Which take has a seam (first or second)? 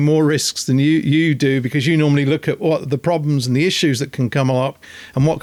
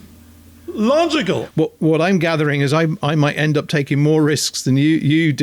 second